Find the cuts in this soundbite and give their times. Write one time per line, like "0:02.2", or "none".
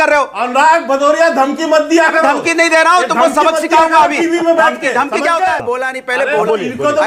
0:05.7